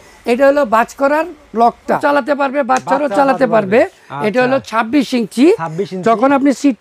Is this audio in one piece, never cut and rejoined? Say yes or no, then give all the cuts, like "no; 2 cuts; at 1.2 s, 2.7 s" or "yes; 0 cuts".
no; 1 cut; at 2.0 s